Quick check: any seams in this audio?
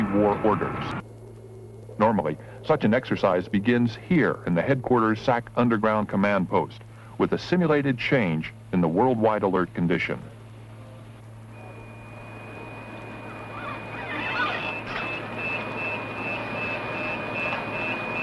yes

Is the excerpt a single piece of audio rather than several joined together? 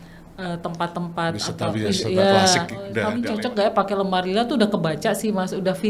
no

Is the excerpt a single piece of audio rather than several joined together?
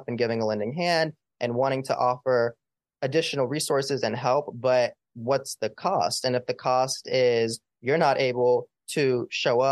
yes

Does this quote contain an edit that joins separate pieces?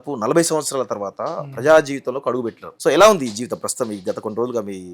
yes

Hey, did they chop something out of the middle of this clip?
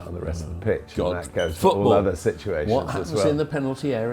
no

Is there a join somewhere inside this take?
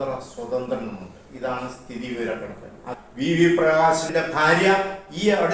yes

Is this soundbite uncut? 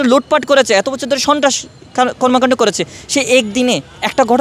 yes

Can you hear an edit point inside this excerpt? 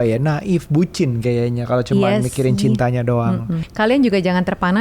yes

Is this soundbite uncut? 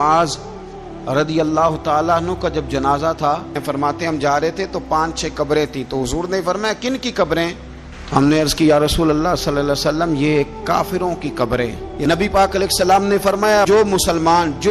no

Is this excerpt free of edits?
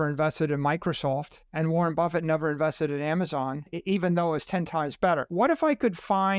no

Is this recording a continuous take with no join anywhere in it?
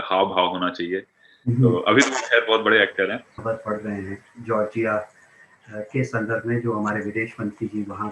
no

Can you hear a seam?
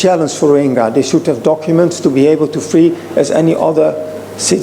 no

